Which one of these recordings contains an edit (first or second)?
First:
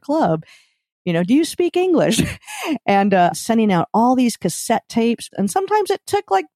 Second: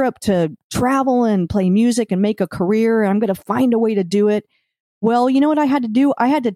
first